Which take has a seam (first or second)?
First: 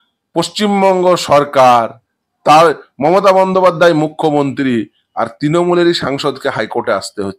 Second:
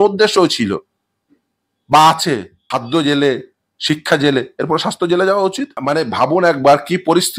second